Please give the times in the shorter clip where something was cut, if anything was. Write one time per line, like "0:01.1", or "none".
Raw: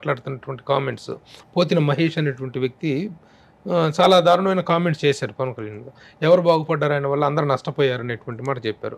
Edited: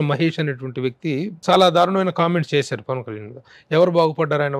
0:01.4